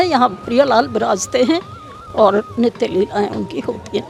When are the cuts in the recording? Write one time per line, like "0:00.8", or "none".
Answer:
none